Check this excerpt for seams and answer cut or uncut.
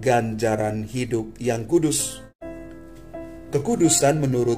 cut